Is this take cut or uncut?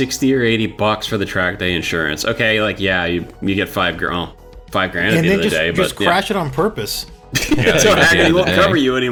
uncut